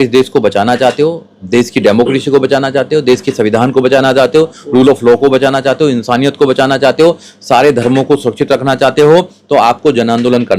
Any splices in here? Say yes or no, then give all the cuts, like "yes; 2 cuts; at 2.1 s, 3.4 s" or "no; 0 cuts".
no; 0 cuts